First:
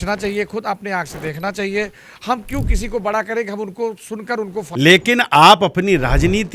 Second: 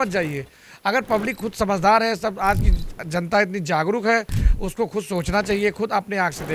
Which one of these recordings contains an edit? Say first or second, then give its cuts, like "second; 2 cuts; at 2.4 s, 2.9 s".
first; 1 cut; at 4.6 s